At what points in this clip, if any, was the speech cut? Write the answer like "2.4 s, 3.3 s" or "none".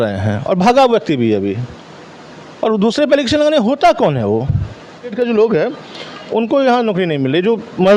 5.1 s